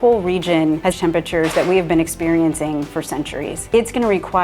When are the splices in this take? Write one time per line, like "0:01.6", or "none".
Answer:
0:00.9
0:03.6

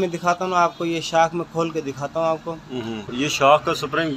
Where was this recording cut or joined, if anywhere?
0:03.1

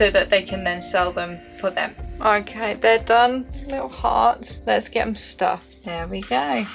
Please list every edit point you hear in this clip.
0:02.1
0:03.6
0:04.5
0:05.8

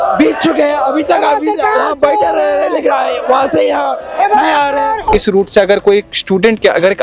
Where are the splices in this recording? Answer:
0:05.1

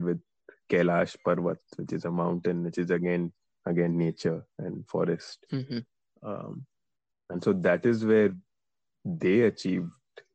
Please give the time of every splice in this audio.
none

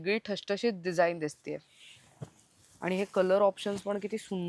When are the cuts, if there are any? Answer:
none

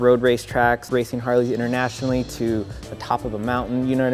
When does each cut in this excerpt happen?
none

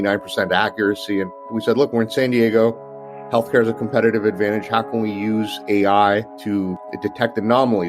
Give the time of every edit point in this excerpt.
0:01.5
0:06.7

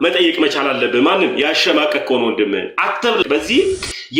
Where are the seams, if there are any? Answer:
0:03.3

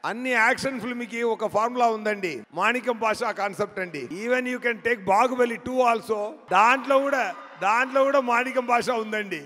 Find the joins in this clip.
0:02.4
0:04.1
0:06.4

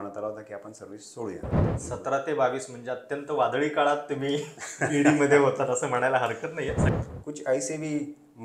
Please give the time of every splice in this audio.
0:01.7
0:06.8

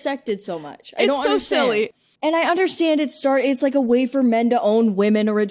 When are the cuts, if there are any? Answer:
0:02.0

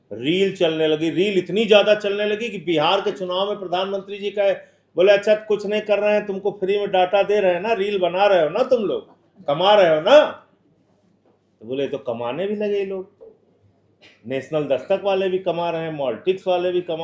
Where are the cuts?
none

